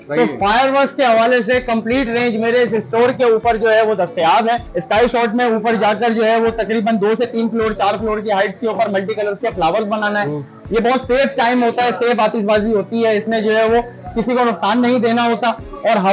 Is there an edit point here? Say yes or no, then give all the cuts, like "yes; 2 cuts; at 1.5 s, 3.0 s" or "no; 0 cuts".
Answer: yes; 1 cut; at 4.7 s